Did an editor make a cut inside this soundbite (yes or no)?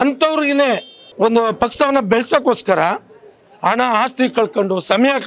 yes